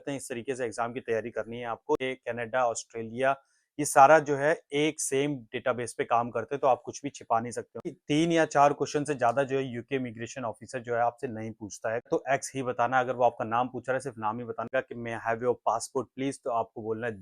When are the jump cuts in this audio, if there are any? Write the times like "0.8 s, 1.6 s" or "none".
2.0 s, 8.0 s, 12.1 s, 14.7 s